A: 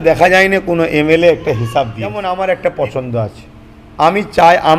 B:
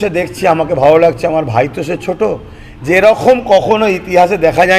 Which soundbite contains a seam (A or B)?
A